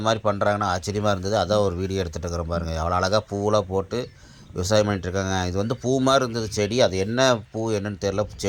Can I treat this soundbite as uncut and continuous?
yes; 0 cuts

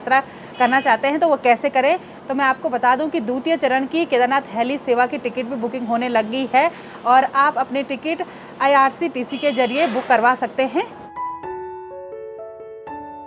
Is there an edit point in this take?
no; 0 cuts

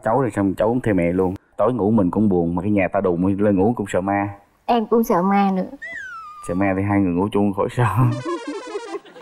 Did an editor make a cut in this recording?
yes; 1 cut; at 1.4 s

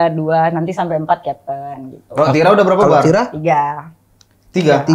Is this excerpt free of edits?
yes; 0 cuts

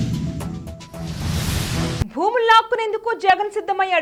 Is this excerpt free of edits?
yes; 0 cuts

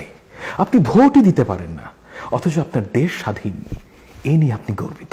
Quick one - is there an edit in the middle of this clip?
no; 0 cuts

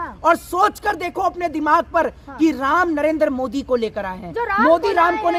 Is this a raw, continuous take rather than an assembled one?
yes; 0 cuts

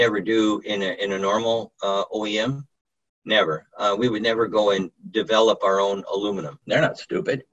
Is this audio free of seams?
no; 1 cut; at 6.5 s

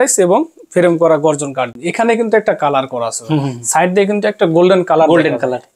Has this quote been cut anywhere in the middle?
yes; 1 cut; at 1.7 s

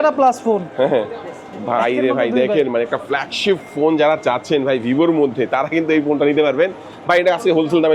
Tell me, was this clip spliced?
no; 0 cuts

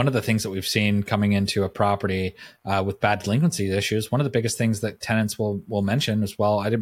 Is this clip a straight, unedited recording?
yes; 0 cuts

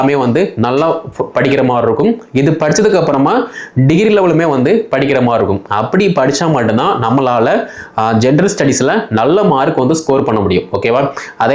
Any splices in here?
no; 0 cuts

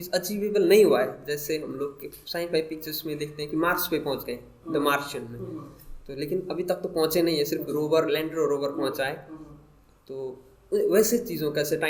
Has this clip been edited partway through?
no; 0 cuts

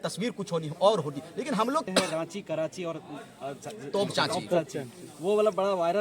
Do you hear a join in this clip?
yes; 1 cut; at 1.8 s

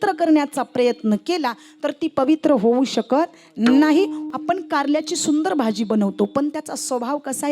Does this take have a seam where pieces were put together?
yes; 1 cut; at 4.2 s

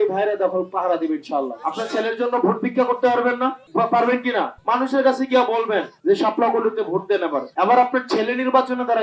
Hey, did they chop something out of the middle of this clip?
yes; 1 cut; at 1.6 s

